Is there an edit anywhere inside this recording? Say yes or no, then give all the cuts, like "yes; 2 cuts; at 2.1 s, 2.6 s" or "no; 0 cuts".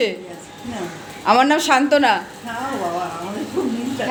no; 0 cuts